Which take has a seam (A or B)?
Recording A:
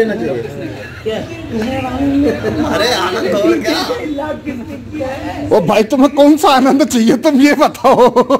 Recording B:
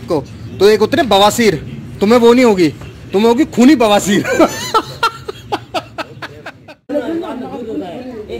B